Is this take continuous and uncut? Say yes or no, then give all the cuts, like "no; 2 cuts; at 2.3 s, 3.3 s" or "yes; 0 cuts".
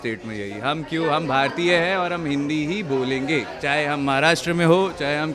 yes; 0 cuts